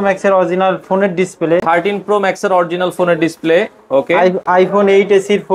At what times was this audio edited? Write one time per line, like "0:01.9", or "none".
none